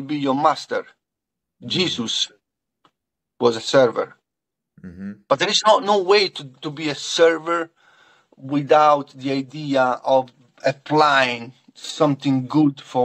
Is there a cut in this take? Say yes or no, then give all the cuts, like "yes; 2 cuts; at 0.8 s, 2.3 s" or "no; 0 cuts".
yes; 1 cut; at 10.6 s